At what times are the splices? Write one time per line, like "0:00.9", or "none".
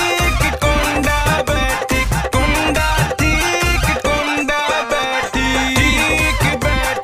none